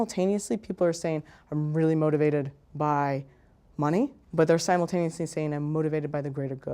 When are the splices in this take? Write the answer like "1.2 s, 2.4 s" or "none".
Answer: 4.2 s